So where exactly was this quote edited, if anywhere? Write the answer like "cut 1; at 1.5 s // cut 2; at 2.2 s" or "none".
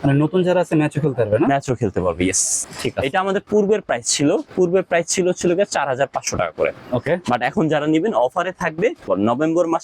cut 1; at 2.6 s // cut 2; at 9.1 s

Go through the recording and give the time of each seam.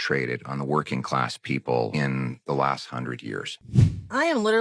cut 1; at 3.5 s

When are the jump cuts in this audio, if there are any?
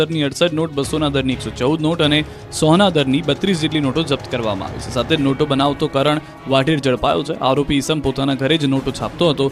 none

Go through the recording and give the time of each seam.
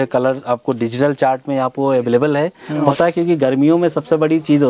cut 1; at 2.9 s

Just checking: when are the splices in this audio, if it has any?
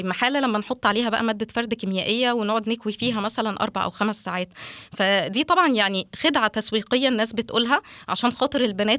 none

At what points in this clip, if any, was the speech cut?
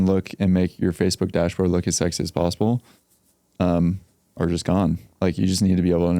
none

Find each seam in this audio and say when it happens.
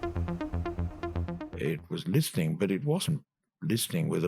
cut 1; at 1.4 s

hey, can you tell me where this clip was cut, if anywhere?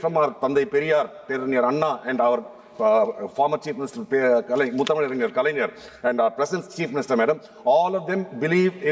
none

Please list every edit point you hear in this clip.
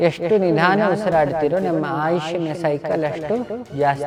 none

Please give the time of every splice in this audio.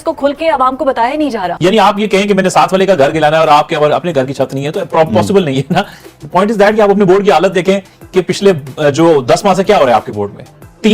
cut 1; at 1.5 s

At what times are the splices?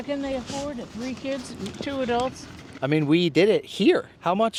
none

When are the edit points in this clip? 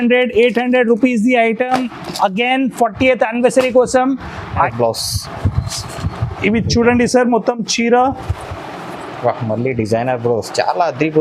cut 1; at 4.7 s

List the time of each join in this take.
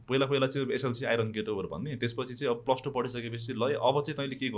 none

